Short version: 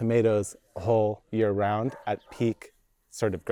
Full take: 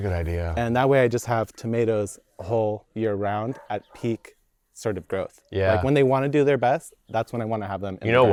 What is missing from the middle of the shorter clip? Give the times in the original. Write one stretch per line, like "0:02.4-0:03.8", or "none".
none